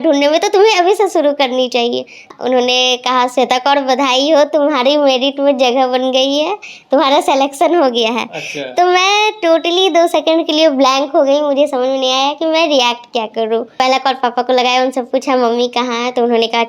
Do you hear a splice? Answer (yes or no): yes